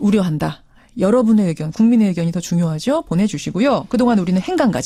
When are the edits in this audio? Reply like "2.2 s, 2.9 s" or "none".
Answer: none

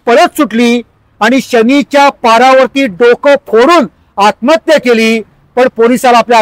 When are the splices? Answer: none

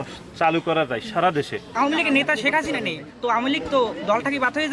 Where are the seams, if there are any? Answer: 1.6 s

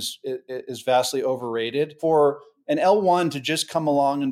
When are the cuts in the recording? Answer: 2.0 s

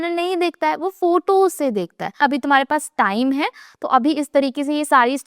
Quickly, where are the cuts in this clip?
2.2 s

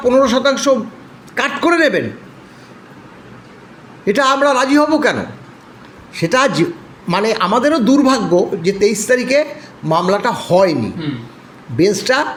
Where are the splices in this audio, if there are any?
none

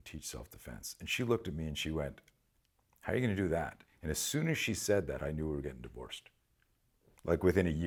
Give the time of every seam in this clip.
none

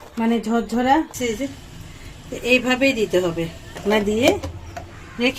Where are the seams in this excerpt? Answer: 1.2 s, 3.8 s

